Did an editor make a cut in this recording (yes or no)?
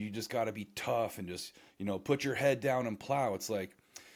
no